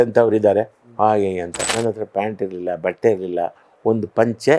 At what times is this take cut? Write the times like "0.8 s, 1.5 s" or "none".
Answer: 1.6 s